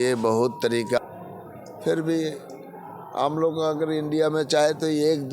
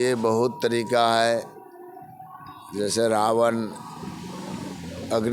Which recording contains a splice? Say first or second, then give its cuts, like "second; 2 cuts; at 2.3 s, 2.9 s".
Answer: first; 1 cut; at 1.0 s